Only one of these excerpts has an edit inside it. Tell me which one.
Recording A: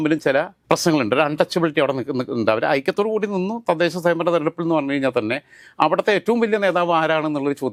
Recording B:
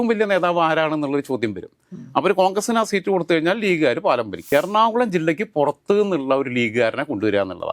B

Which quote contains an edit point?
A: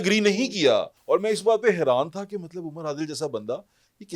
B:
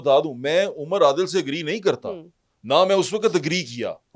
A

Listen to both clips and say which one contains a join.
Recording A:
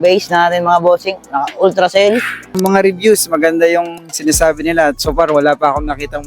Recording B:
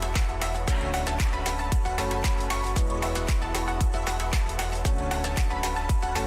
A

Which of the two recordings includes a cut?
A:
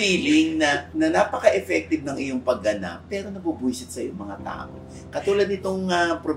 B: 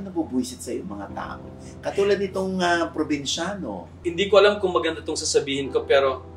B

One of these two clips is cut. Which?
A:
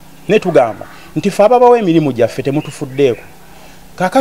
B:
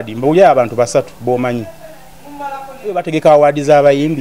B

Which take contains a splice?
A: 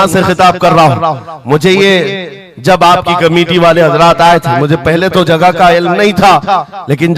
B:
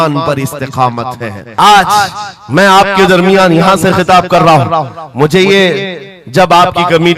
B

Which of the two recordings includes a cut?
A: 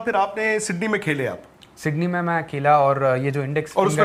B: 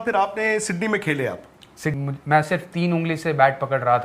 B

